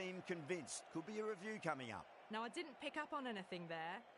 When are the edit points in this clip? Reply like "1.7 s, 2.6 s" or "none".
2.1 s